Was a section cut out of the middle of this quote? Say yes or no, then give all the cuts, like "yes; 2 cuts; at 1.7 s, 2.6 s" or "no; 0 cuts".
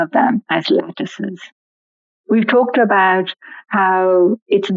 no; 0 cuts